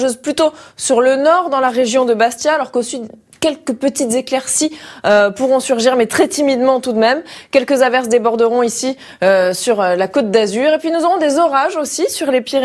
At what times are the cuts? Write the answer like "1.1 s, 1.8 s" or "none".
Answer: 3.3 s